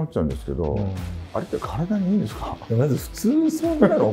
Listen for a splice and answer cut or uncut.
cut